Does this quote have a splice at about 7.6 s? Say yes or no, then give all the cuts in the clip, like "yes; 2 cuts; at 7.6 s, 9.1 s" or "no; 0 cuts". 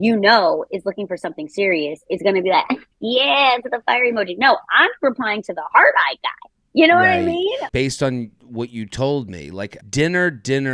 yes; 2 cuts; at 7.6 s, 9.8 s